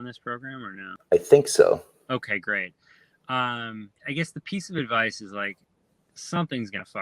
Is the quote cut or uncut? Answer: cut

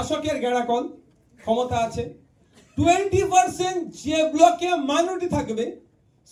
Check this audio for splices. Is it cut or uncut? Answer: uncut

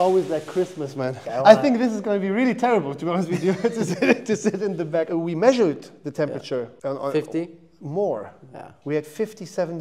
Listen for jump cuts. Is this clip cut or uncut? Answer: cut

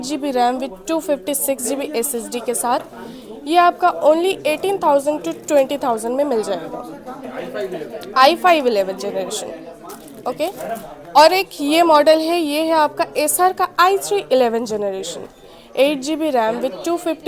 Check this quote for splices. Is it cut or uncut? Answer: uncut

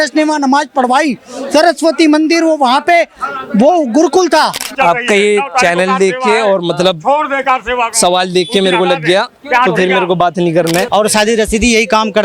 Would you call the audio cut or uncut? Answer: cut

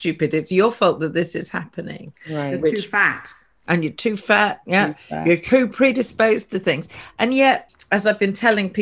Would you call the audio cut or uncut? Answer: cut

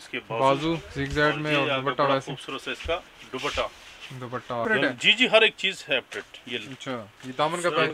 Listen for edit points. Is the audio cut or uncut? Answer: cut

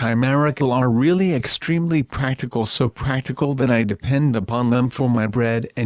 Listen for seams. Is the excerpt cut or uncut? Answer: uncut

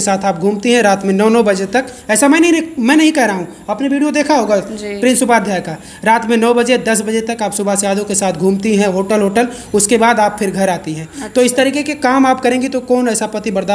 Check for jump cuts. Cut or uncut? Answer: uncut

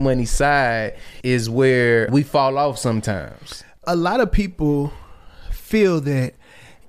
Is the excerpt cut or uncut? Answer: cut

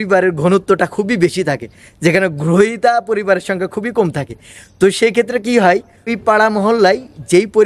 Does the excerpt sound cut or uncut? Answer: cut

